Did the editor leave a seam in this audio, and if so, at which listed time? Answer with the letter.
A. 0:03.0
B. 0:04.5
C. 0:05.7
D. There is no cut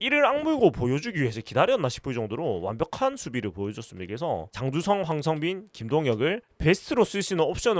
B